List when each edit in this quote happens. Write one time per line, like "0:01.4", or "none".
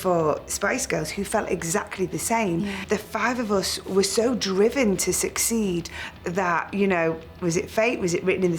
0:02.8
0:03.8